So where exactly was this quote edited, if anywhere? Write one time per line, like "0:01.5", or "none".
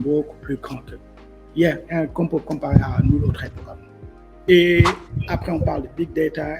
0:04.3